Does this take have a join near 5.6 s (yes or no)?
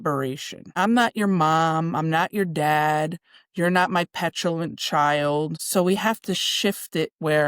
yes